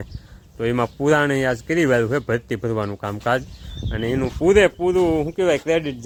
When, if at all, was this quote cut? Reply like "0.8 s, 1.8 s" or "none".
none

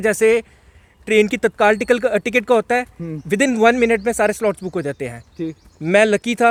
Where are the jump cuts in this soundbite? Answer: none

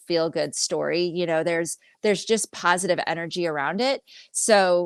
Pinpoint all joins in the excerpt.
none

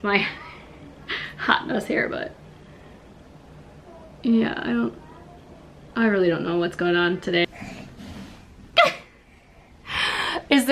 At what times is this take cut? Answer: 7.4 s

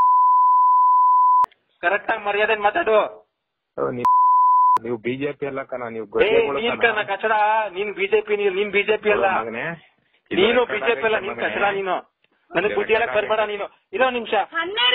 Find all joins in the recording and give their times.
1.3 s

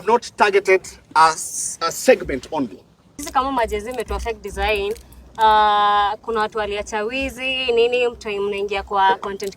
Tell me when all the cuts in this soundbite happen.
3.2 s

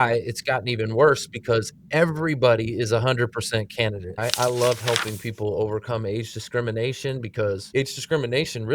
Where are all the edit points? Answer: 4.1 s

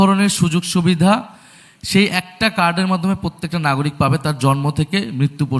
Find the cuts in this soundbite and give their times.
none

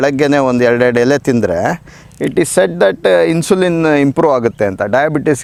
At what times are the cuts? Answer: none

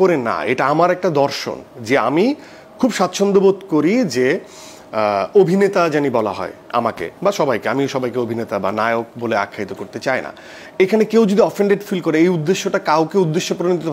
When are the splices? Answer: none

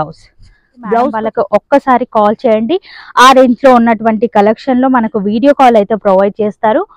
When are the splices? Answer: 1.2 s

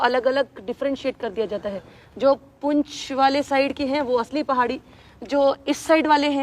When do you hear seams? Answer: none

